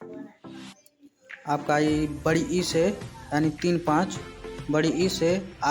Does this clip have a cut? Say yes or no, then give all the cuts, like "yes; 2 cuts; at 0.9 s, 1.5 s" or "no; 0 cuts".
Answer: yes; 1 cut; at 1.5 s